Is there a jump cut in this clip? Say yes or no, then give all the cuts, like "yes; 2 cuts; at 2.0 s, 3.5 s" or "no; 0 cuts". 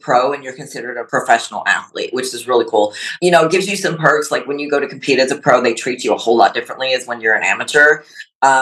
yes; 1 cut; at 0.9 s